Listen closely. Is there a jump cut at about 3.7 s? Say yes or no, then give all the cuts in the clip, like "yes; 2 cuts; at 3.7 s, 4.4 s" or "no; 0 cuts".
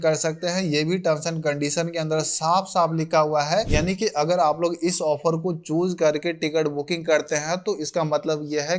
yes; 1 cut; at 3.7 s